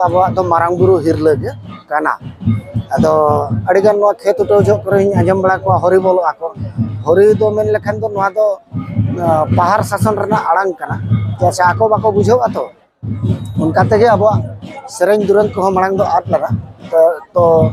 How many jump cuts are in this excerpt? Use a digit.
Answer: 0